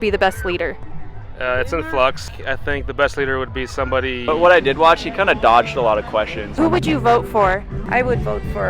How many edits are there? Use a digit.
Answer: 4